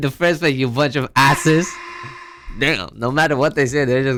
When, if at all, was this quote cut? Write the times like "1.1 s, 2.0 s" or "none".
none